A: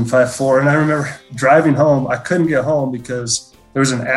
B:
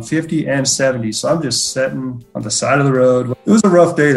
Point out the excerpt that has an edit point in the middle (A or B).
B